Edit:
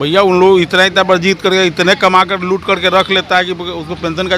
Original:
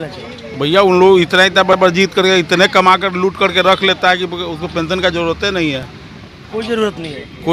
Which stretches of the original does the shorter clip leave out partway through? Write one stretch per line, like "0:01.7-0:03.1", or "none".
0:01.7-0:01.8